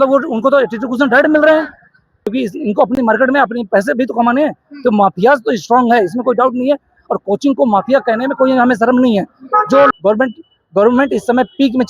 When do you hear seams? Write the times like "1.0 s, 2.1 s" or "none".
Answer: 2.2 s, 9.9 s